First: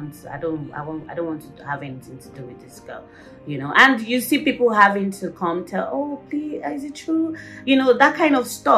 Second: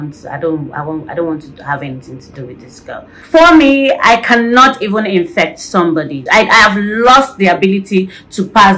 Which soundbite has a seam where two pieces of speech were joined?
second; 2 cuts; at 3.2 s, 6.2 s

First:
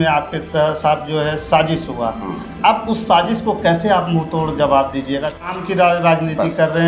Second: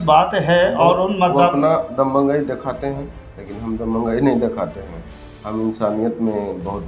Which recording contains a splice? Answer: first; 1 cut; at 5.4 s

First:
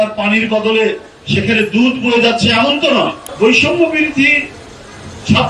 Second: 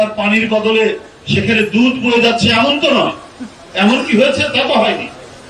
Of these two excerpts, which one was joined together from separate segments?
first; 1 cut; at 3.2 s

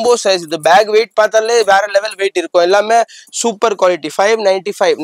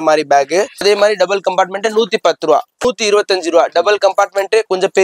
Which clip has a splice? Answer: second; 2 cuts; at 0.8 s, 2.8 s

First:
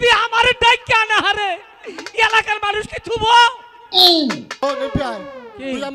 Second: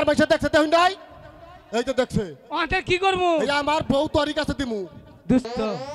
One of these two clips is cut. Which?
first; 1 cut; at 4.5 s

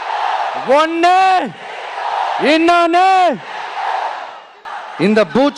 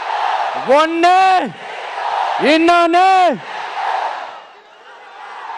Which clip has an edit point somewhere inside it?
first; 1 cut; at 4.6 s

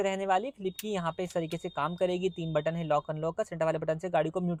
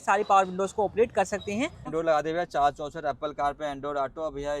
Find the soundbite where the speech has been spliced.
second; 1 cut; at 1.9 s

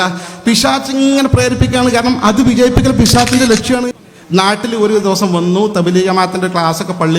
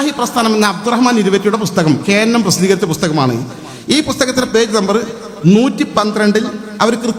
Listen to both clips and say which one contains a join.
first; 1 cut; at 3.9 s

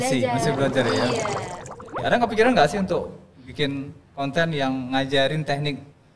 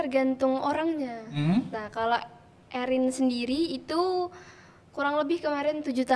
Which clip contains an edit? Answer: first; 1 cut; at 2.0 s

